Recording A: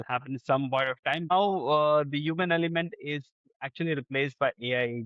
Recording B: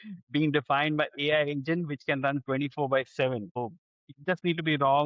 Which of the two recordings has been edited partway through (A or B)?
A